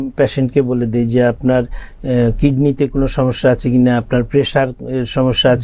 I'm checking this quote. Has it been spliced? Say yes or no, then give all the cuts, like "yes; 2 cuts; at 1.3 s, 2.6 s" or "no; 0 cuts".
no; 0 cuts